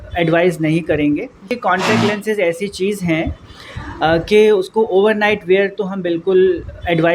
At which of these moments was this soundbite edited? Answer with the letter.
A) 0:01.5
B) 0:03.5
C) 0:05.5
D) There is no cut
A